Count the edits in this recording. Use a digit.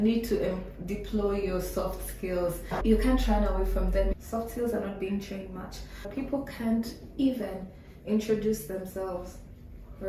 1